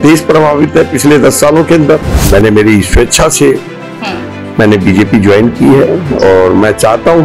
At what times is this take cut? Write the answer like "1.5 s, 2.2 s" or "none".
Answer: 2.2 s